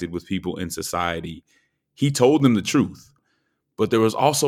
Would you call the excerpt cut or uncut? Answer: cut